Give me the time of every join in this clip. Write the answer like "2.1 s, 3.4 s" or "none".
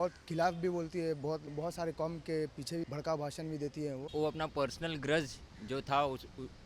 1.5 s, 2.8 s, 4.0 s